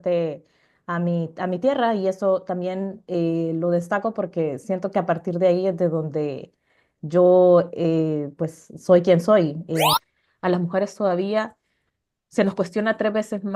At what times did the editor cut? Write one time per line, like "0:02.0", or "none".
0:09.9